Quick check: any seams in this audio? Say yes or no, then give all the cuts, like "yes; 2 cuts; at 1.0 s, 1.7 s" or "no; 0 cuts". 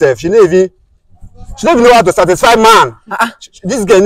no; 0 cuts